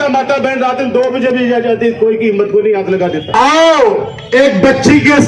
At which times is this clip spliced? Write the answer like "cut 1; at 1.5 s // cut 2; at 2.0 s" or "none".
cut 1; at 3.2 s